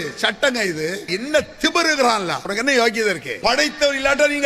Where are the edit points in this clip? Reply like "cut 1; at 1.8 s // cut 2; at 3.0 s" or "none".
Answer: cut 1; at 1.1 s // cut 2; at 2.4 s // cut 3; at 3.3 s